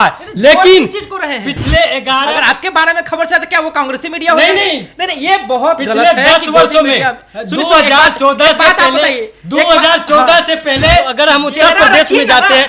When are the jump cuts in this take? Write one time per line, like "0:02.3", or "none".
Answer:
0:02.2
0:11.1